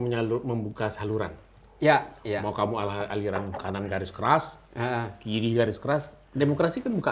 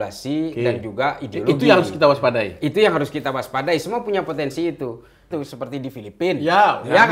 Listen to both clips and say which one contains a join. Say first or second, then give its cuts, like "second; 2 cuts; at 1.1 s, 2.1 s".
second; 1 cut; at 5.3 s